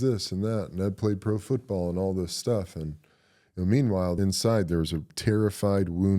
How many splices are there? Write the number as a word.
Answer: two